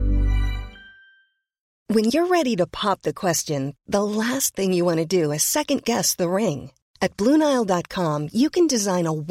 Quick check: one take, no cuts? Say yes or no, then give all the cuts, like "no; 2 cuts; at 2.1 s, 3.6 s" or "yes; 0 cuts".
no; 1 cut; at 1.8 s